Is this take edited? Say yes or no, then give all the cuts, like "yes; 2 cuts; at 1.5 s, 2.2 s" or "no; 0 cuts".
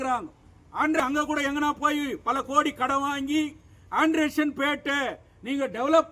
yes; 1 cut; at 1.0 s